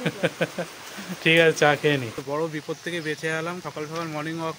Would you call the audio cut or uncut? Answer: cut